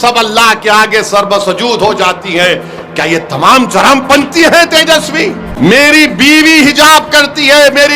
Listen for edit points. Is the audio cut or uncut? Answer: cut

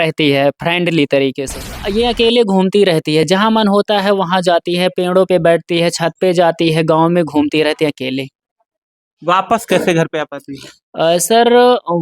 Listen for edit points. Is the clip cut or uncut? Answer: cut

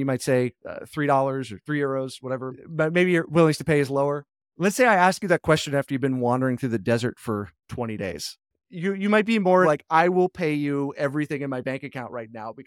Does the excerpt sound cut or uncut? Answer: cut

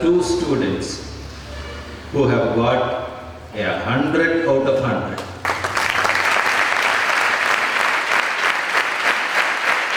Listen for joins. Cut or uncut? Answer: uncut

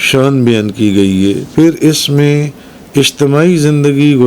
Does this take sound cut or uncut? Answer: cut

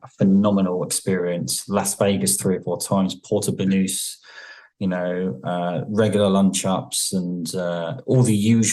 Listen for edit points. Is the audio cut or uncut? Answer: uncut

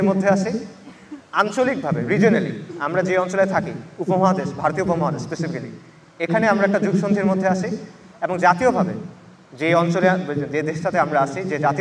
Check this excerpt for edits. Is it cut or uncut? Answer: uncut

